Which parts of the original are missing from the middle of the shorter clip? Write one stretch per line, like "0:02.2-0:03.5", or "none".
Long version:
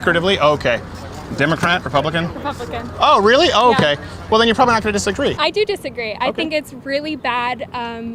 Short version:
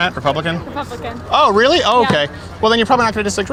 none